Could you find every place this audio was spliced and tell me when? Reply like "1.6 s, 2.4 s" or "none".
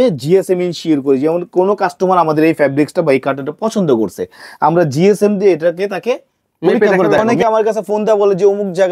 7.3 s

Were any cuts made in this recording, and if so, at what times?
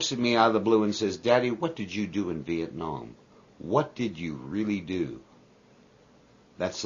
none

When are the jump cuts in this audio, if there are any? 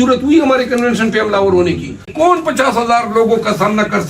2.1 s

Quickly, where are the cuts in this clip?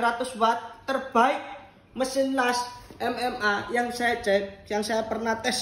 none

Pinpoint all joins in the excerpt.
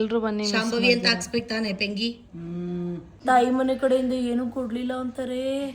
3.2 s

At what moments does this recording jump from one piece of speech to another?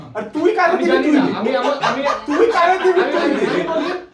none

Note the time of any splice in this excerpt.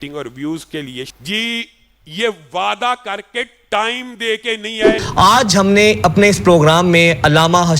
1.1 s, 5.0 s

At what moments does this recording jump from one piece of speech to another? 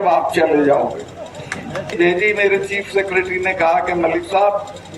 1.9 s

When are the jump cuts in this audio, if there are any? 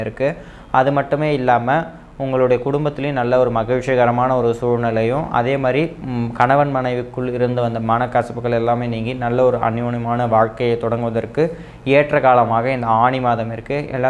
none

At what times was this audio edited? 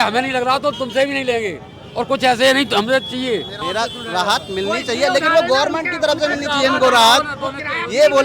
3.5 s

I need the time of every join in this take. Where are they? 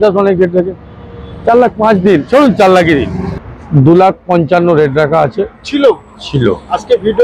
3.2 s

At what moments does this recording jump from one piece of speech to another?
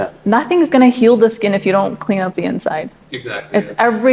none

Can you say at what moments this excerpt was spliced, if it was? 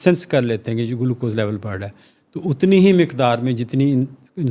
none

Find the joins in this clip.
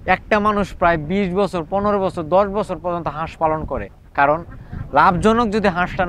none

